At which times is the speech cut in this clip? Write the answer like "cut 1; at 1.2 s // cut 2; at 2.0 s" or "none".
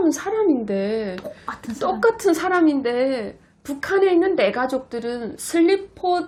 none